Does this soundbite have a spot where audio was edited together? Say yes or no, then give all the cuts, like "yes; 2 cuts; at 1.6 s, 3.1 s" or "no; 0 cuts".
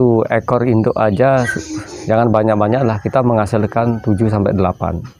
no; 0 cuts